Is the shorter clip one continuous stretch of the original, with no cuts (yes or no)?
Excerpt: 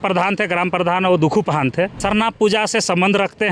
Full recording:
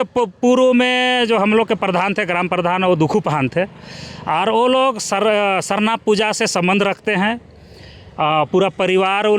no